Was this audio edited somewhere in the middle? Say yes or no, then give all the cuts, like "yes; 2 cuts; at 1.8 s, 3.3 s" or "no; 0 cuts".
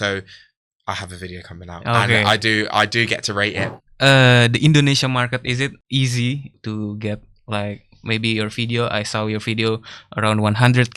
yes; 3 cuts; at 3.7 s, 5.8 s, 6.5 s